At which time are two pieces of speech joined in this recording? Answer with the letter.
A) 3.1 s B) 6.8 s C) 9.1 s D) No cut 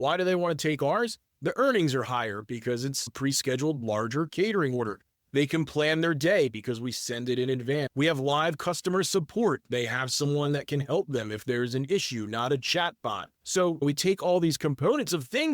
A